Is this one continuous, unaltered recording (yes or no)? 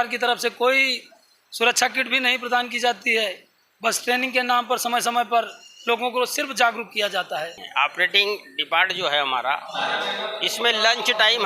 no